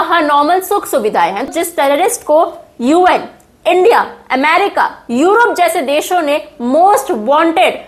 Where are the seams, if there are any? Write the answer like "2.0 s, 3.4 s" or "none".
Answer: 1.5 s